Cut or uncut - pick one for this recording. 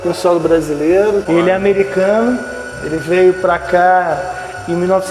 cut